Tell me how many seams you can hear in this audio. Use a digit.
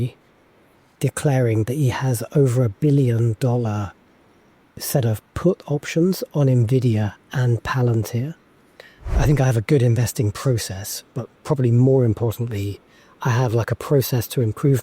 2